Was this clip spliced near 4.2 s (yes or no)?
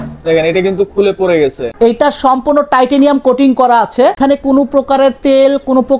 yes